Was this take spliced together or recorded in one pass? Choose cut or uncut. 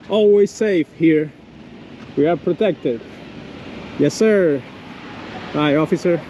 uncut